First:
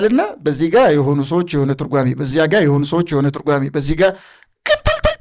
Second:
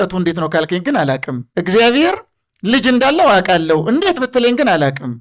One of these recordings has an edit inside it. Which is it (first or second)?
second